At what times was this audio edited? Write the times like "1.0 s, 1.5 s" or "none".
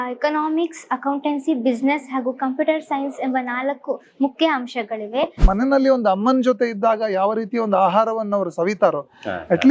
5.4 s